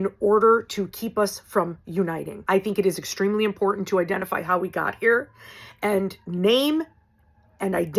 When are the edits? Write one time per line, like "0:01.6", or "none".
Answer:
0:02.4